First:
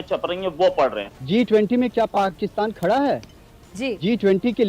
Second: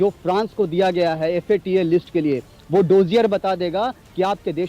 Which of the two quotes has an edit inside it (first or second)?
first